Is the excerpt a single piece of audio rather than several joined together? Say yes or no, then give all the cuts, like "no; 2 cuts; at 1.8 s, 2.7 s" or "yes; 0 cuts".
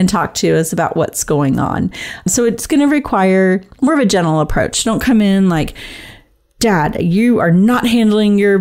no; 1 cut; at 2.3 s